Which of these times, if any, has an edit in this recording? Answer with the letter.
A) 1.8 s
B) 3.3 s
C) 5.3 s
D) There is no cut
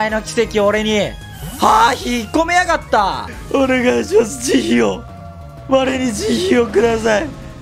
B